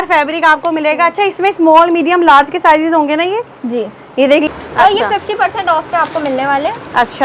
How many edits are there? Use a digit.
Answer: 1